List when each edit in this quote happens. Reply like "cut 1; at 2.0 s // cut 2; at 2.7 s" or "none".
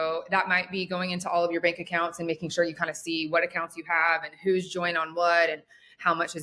none